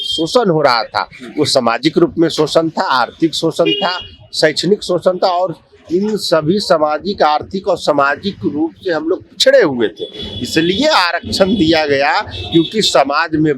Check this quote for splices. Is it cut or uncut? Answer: uncut